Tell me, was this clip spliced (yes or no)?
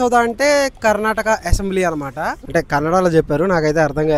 yes